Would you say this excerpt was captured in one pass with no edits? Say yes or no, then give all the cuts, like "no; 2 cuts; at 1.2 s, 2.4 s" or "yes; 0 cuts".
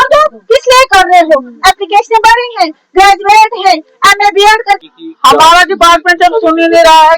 no; 1 cut; at 4.8 s